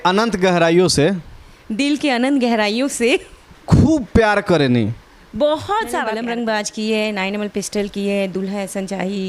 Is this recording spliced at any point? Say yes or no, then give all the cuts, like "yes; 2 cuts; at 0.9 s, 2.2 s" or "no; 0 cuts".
yes; 1 cut; at 6.2 s